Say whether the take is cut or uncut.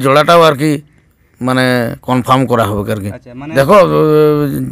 cut